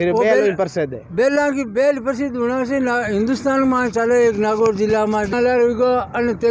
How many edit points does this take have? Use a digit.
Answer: 1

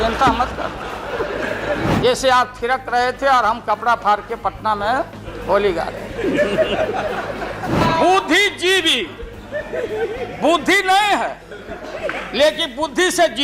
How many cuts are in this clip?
2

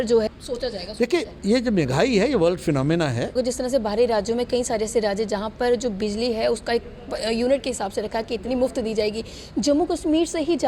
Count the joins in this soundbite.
1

